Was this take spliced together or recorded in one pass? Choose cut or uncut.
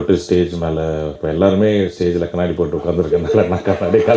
cut